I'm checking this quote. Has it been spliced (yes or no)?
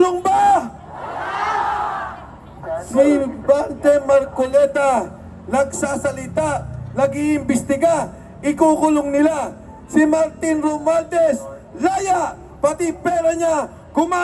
no